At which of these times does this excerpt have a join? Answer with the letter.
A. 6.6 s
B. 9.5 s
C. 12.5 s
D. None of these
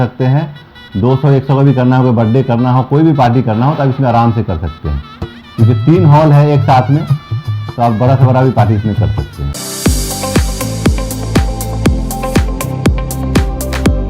B